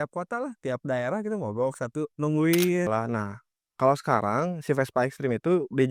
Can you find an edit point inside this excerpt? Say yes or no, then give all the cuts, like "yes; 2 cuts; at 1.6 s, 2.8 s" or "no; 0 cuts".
yes; 1 cut; at 2.9 s